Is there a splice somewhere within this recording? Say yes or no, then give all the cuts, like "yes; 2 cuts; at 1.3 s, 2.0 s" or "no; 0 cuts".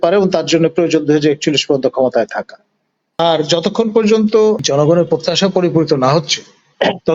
yes; 2 cuts; at 3.2 s, 4.6 s